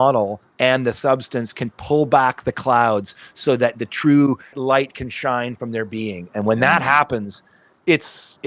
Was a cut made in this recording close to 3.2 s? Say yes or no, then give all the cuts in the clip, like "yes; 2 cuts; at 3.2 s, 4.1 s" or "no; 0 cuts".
no; 1 cut; at 4.6 s